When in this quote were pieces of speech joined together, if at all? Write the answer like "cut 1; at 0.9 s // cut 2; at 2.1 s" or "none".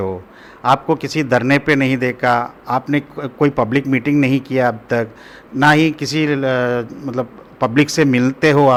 none